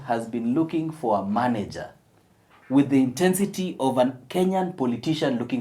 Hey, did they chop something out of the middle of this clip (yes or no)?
no